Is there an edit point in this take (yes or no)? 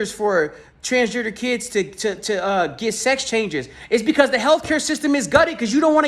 no